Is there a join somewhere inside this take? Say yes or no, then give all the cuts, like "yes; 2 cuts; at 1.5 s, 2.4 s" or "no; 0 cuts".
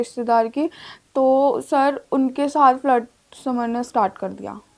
no; 0 cuts